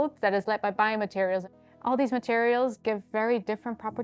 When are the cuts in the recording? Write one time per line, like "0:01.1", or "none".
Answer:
0:01.5